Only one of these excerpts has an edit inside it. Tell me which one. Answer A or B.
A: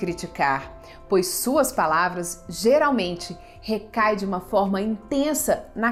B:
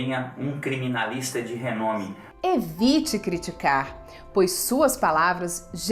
B